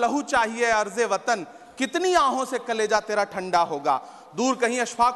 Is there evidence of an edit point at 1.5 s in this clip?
no; 0 cuts

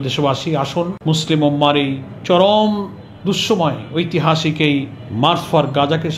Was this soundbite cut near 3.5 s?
no; 3 cuts; at 1.0 s, 2.1 s, 5.0 s

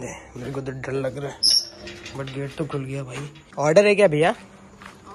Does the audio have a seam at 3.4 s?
yes; 1 cut; at 3.4 s

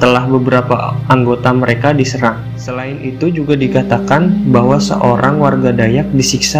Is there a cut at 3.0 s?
yes; 1 cut; at 3.0 s

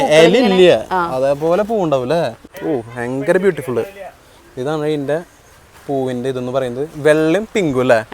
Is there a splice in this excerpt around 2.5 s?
yes; 1 cut; at 2.5 s

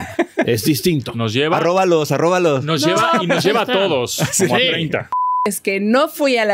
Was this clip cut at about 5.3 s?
yes; 1 cut; at 5.3 s

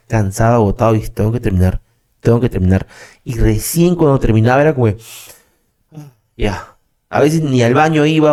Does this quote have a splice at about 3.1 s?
no; 0 cuts

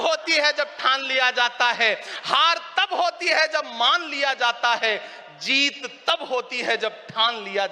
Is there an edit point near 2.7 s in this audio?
no; 0 cuts

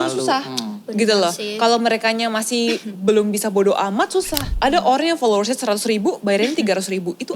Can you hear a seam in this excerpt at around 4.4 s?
yes; 1 cut; at 4.4 s

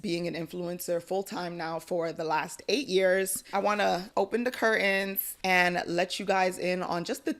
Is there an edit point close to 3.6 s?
yes; 2 cuts; at 3.6 s, 5.2 s

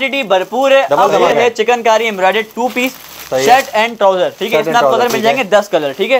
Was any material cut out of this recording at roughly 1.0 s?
yes; 1 cut; at 1.0 s

